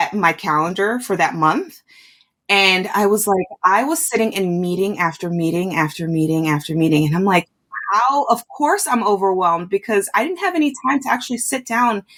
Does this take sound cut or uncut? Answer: uncut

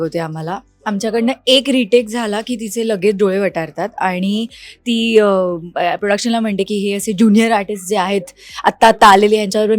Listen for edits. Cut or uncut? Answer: uncut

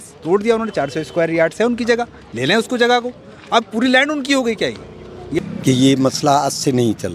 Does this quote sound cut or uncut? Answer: cut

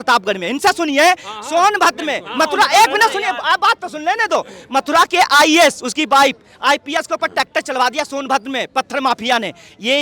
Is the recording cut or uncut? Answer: uncut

